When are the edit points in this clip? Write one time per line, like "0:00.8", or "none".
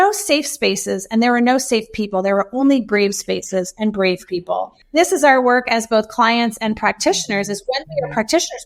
0:04.8